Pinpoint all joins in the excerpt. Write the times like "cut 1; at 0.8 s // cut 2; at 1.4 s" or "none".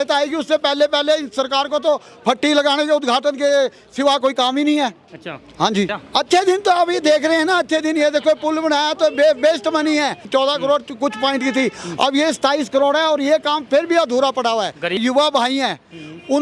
cut 1; at 6.0 s // cut 2; at 10.3 s // cut 3; at 15.0 s